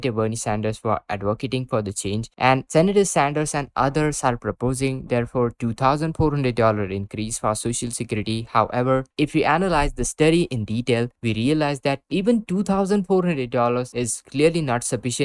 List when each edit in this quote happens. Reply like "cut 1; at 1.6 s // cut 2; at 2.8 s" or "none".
none

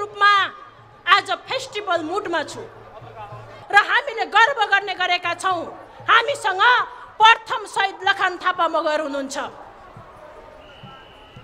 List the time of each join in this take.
cut 1; at 3.6 s

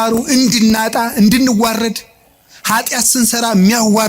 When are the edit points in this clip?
none

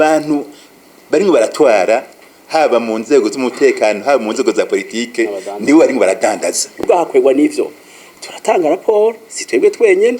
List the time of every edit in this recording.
cut 1; at 6.8 s

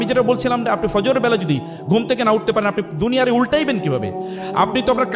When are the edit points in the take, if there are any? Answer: none

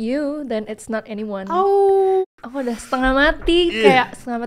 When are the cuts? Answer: cut 1; at 2.2 s

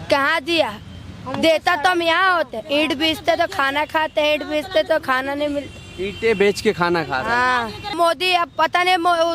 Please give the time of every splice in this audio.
cut 1; at 7.9 s

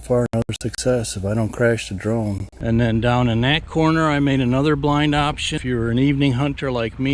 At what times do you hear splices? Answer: cut 1; at 2.5 s // cut 2; at 5.5 s

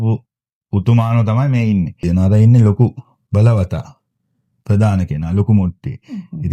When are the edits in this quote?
cut 1; at 2.0 s // cut 2; at 3.1 s

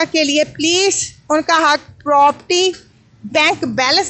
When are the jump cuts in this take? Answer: none

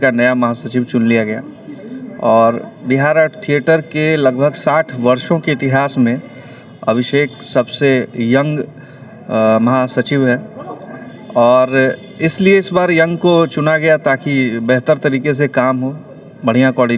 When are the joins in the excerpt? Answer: none

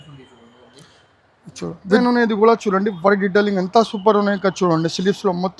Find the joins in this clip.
cut 1; at 1.9 s

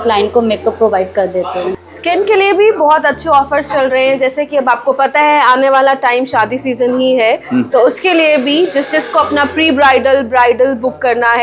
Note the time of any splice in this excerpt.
cut 1; at 1.7 s

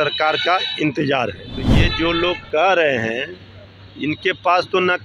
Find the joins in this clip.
cut 1; at 1.6 s

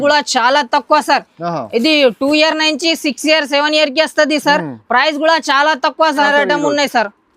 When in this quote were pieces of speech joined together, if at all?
cut 1; at 6.2 s

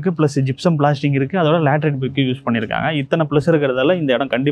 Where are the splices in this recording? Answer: none

